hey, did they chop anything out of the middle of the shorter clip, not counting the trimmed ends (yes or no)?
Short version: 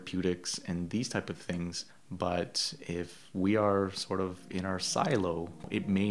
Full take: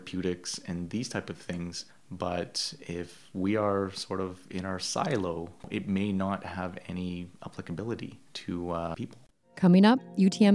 no